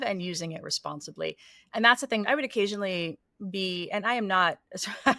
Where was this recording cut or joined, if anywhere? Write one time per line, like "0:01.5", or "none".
0:02.2

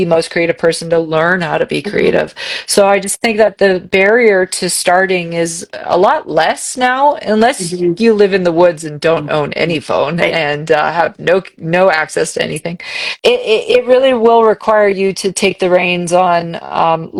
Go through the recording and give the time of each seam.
none

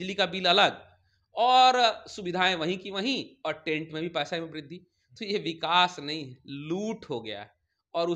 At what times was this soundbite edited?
none

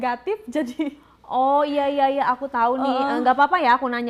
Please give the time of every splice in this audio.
none

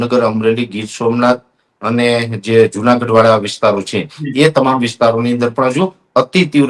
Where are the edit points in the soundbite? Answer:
none

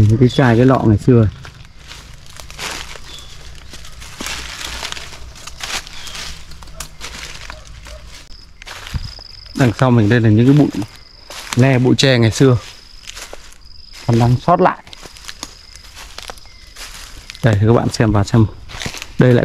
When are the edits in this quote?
0:08.2

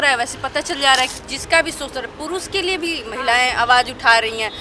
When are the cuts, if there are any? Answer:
0:01.2

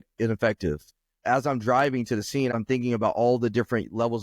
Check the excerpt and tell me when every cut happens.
0:01.2
0:02.5

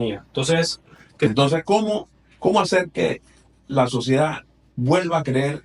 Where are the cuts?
0:01.3

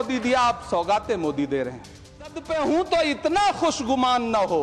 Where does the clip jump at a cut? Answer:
0:02.4

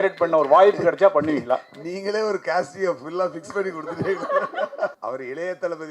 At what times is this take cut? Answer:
0:05.0

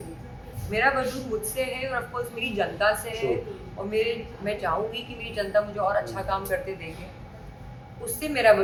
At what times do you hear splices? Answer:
none

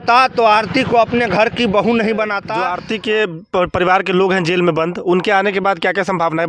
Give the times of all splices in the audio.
0:02.4

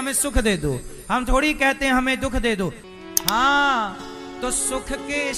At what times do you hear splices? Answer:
0:02.8

